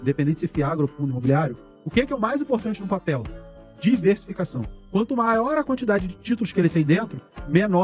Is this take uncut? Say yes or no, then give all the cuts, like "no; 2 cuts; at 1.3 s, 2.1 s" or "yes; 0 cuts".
yes; 0 cuts